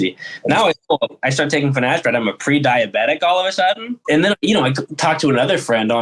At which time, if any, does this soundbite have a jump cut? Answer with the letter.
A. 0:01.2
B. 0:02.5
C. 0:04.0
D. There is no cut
C